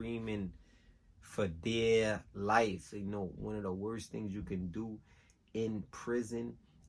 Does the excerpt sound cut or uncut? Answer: cut